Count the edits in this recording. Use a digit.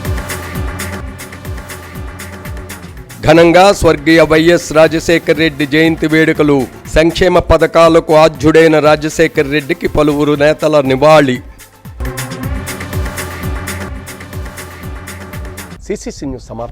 0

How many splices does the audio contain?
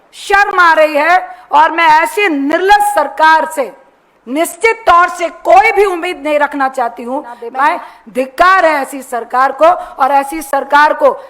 1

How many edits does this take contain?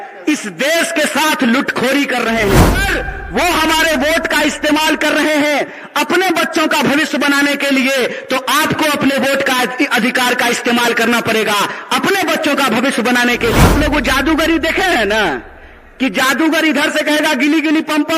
2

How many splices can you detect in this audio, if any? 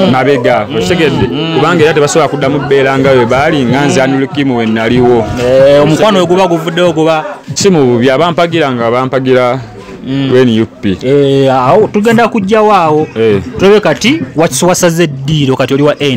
1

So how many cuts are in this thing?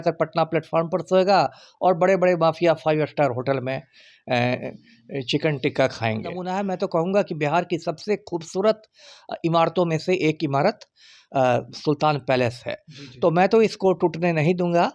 1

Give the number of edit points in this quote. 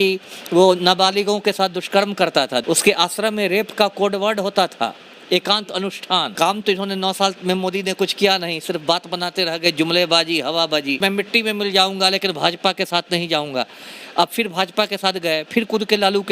3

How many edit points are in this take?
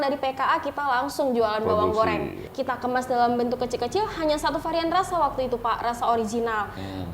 1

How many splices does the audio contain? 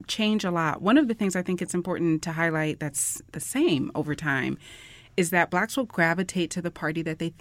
0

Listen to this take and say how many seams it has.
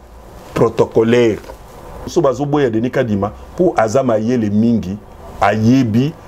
1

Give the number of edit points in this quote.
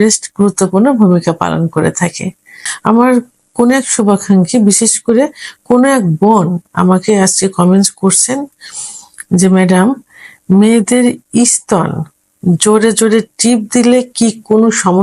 1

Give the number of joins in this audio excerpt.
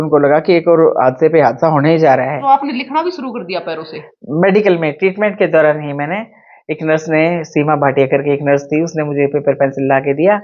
1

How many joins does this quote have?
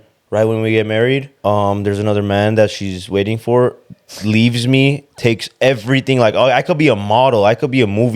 1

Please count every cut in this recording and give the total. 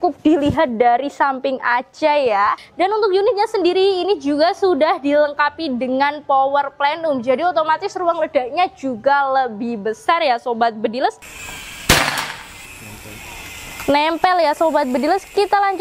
2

